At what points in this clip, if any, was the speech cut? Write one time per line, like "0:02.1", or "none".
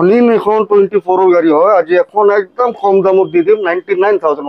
none